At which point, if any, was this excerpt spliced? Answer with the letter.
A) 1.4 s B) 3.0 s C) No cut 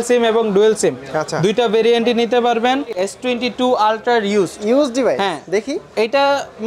B